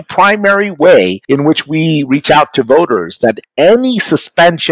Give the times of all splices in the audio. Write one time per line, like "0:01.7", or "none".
0:01.2
0:03.5

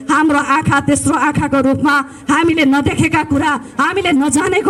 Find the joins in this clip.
none

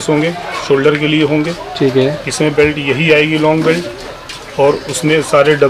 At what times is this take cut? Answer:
none

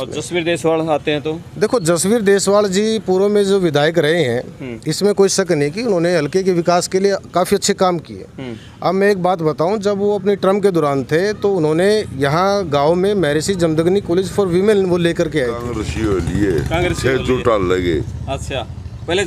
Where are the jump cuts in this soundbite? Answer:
0:15.8

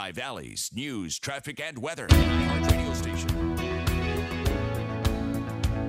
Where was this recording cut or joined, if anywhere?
0:02.0

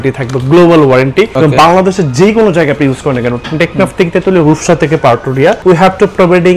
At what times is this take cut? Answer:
0:01.3
0:05.6

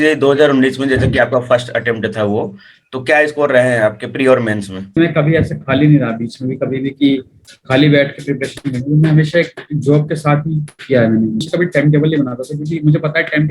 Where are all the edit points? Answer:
0:05.0
0:11.5

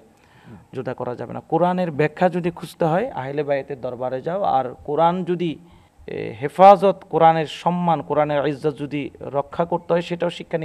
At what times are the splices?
none

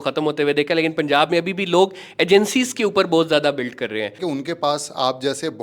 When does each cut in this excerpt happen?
0:04.2

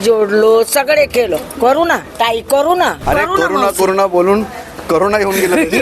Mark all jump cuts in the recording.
0:02.1
0:03.0

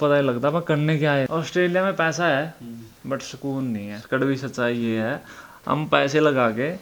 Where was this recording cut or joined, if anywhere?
0:01.3
0:04.1

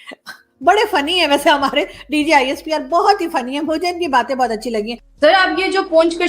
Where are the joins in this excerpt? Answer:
0:05.0

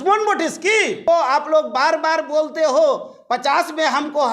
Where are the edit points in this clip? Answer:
0:01.1

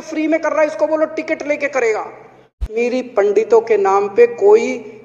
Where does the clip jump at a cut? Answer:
0:02.7

